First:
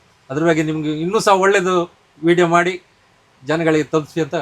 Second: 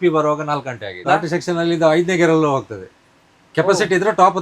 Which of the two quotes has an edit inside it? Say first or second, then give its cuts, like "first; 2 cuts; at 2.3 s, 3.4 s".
second; 1 cut; at 1.0 s